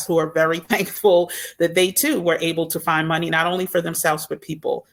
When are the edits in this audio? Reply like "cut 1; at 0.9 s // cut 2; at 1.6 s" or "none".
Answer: none